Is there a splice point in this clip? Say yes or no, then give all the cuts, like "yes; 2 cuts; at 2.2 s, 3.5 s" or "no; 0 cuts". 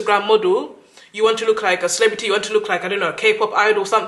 no; 0 cuts